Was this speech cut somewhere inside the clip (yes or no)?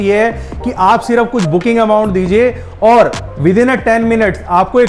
no